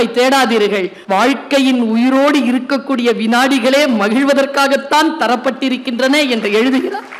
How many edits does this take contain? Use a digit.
1